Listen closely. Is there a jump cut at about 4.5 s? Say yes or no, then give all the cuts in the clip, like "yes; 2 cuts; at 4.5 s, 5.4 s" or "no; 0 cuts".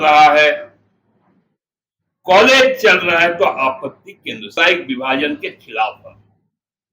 yes; 1 cut; at 4.5 s